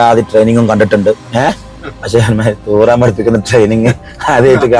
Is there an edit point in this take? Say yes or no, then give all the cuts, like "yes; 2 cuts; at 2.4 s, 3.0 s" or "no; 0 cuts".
no; 0 cuts